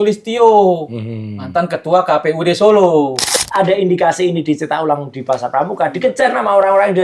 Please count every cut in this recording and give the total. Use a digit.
1